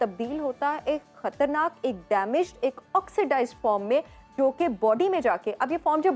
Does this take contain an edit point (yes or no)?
no